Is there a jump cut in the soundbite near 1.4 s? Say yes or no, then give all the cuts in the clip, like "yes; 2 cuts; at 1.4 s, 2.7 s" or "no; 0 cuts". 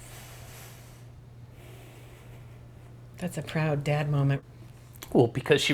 no; 1 cut; at 4.4 s